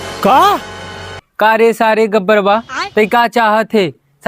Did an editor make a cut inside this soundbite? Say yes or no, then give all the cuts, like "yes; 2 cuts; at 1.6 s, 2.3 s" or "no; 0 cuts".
yes; 1 cut; at 1.2 s